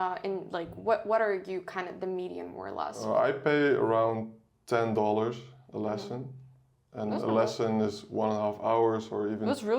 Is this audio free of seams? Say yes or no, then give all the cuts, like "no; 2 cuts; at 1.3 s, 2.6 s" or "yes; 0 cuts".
no; 1 cut; at 3.0 s